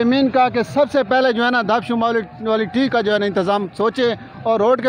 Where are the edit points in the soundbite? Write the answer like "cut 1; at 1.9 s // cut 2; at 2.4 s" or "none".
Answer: none